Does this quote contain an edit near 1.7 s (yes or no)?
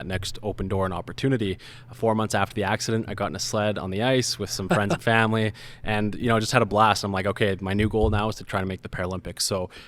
yes